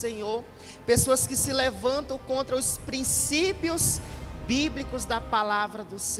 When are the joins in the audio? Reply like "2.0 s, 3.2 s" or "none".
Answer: none